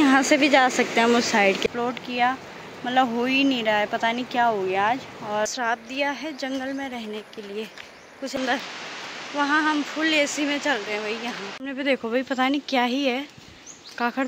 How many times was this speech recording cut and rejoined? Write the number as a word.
four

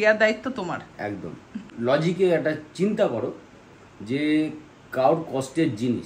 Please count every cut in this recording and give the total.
one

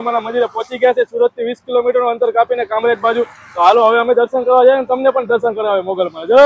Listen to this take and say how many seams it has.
zero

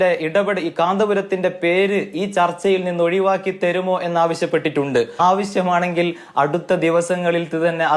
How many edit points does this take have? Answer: one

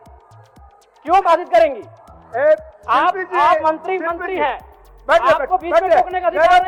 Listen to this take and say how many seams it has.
zero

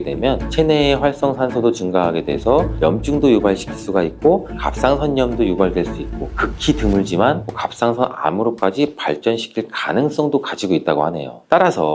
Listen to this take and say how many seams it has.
zero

